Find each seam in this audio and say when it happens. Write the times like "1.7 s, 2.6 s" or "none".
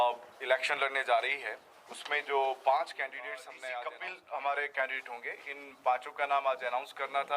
3.6 s